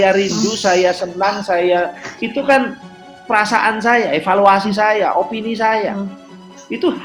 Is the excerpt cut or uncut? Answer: uncut